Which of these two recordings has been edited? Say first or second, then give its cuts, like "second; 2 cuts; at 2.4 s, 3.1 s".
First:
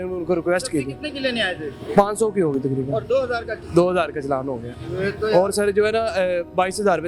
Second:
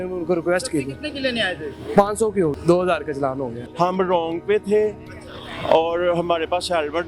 second; 2 cuts; at 2.5 s, 3.6 s